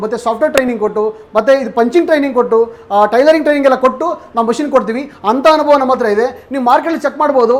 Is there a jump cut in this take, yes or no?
no